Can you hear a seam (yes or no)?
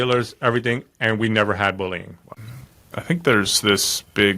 yes